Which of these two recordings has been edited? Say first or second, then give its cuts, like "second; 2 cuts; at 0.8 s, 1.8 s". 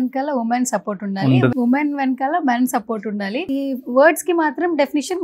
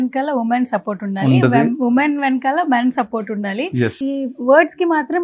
first; 2 cuts; at 1.5 s, 3.4 s